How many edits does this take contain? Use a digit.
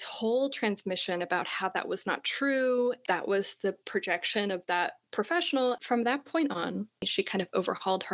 3